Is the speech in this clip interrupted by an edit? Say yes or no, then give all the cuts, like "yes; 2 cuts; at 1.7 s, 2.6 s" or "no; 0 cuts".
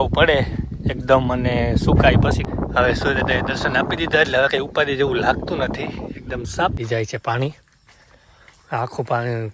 yes; 2 cuts; at 2.5 s, 6.8 s